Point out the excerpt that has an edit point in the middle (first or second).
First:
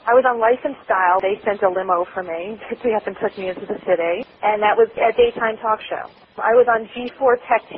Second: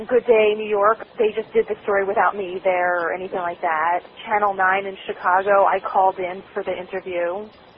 first